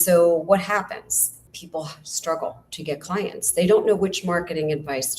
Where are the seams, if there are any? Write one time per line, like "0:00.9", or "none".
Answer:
0:01.3

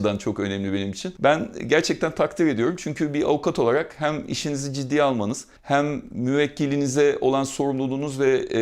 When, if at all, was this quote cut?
0:01.0

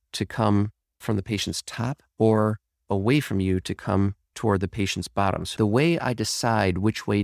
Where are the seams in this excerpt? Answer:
0:05.5

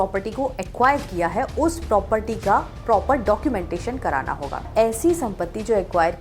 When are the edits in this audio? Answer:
0:04.6

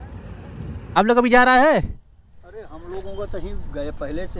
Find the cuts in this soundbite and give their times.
0:01.0

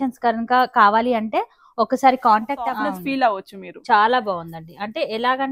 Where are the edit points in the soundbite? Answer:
0:02.8

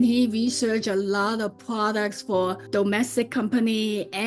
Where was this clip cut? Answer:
0:02.6

